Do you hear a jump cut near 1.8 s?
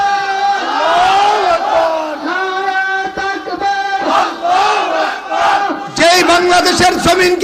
no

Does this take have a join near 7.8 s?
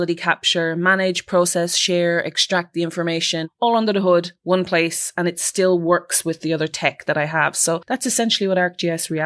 yes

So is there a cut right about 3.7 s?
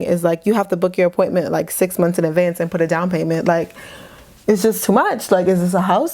no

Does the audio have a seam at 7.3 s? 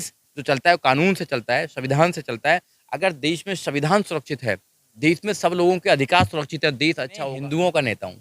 yes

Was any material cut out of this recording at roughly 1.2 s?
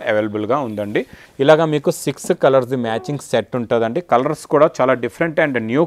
yes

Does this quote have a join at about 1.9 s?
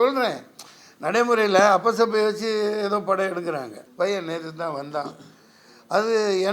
no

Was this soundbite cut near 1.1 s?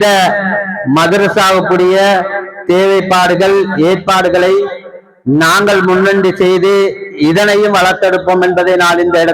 no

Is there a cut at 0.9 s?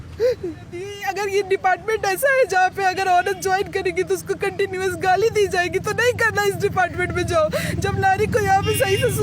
yes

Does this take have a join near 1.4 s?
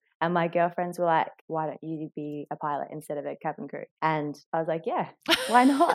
yes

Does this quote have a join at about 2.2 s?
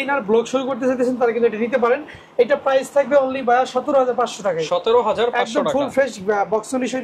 no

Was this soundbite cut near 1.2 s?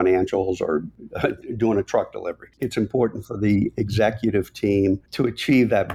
no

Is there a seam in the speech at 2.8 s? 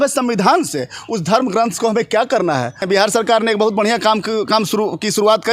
yes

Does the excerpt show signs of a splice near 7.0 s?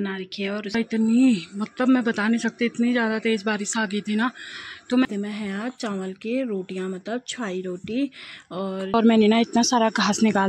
no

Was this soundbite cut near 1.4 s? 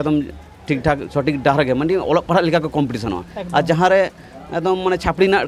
no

